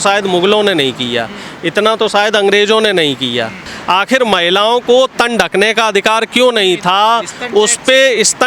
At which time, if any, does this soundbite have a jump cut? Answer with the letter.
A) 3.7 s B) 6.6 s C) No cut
A